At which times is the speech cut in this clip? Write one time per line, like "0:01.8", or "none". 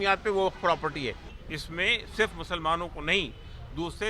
0:01.4